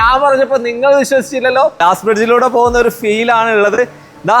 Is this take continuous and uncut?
no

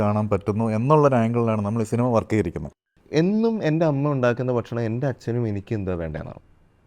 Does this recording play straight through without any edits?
no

